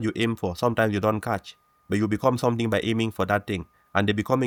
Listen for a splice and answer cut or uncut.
uncut